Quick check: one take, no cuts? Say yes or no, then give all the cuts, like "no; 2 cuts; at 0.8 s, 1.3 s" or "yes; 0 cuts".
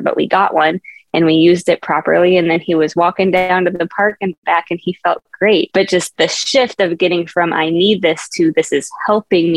no; 1 cut; at 6.1 s